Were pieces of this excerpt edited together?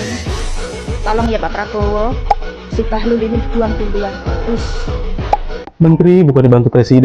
yes; 1 cut; at 5.6 s

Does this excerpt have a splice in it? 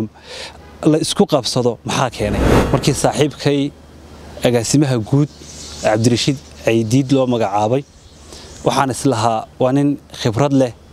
yes; 1 cut; at 2.5 s

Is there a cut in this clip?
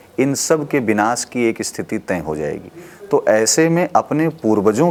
no; 0 cuts

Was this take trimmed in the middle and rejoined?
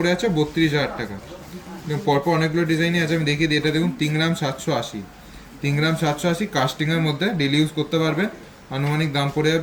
no; 0 cuts

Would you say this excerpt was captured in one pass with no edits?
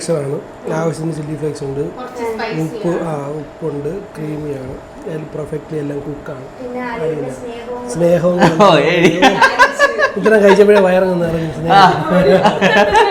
yes; 0 cuts

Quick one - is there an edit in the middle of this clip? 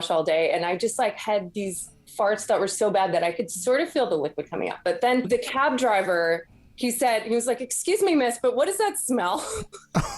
no; 0 cuts

